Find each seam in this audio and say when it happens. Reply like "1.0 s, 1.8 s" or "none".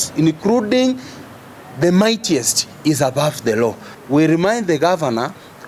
3.9 s